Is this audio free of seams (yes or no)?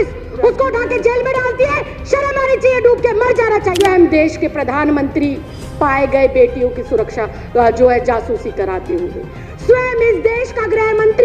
no